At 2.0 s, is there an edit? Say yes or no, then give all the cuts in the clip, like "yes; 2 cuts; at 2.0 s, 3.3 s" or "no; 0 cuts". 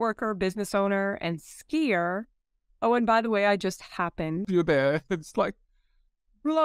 no; 1 cut; at 4.5 s